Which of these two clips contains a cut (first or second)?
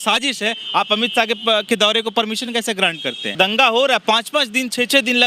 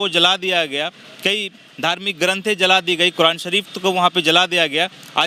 first